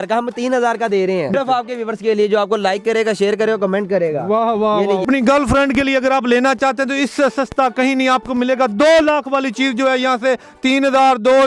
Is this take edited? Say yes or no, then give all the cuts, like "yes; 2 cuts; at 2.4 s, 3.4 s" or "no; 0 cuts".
yes; 2 cuts; at 1.3 s, 5.0 s